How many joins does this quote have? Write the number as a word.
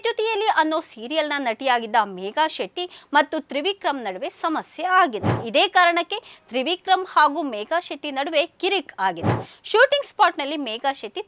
one